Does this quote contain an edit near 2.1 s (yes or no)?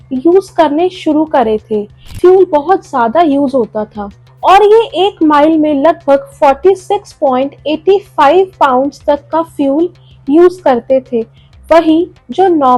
yes